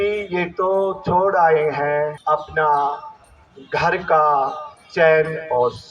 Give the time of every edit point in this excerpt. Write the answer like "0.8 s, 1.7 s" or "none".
2.2 s